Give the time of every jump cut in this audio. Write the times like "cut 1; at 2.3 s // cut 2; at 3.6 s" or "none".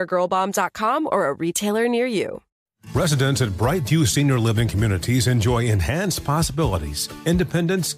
cut 1; at 2.4 s